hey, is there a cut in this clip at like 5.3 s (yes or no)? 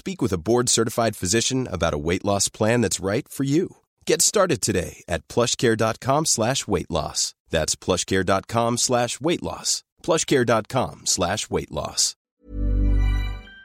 no